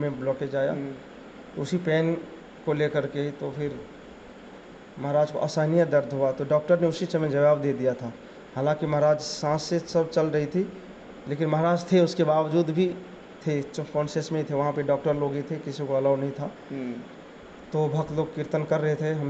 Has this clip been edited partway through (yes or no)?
no